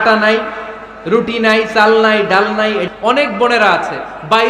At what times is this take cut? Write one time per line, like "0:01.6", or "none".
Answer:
0:02.9